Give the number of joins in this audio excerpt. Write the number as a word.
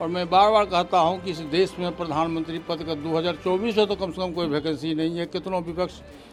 zero